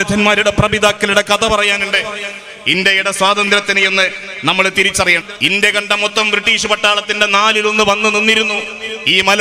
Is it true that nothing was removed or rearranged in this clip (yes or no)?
no